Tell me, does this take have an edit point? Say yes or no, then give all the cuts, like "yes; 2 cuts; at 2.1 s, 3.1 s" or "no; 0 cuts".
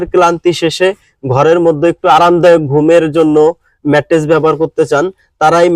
no; 0 cuts